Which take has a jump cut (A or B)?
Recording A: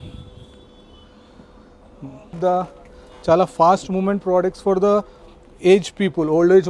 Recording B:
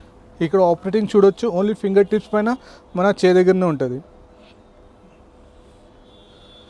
A